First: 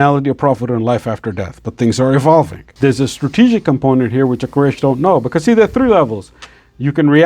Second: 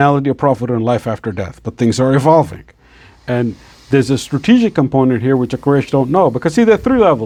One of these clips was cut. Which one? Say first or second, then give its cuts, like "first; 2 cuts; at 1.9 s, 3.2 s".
first; 1 cut; at 2.6 s